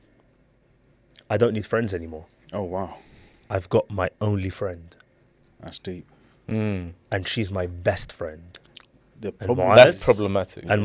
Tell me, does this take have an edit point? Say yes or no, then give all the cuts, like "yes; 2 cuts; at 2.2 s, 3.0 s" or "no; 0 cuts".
no; 0 cuts